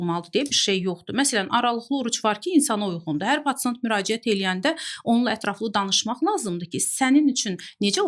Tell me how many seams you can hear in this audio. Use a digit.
0